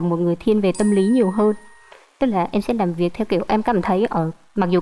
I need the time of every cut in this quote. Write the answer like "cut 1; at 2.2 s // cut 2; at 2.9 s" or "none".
none